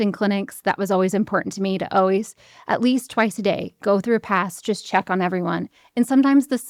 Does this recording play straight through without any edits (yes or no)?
yes